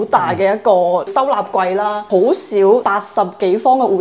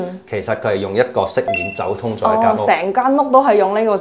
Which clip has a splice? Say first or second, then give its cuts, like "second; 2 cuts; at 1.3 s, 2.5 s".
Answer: first; 3 cuts; at 1.1 s, 2.0 s, 2.9 s